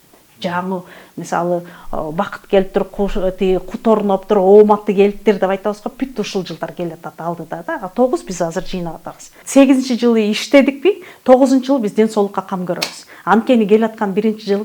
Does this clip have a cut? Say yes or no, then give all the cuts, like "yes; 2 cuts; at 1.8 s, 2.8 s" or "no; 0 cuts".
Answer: yes; 1 cut; at 9.4 s